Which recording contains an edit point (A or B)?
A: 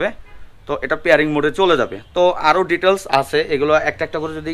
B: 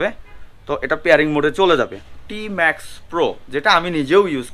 B